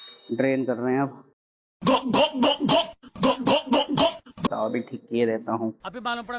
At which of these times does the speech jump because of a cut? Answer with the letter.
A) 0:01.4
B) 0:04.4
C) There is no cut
B